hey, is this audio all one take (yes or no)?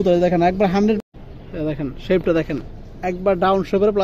no